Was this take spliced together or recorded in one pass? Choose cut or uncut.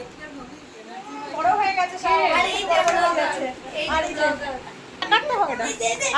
uncut